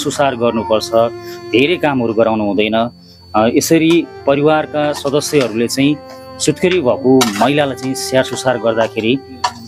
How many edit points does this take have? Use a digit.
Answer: 0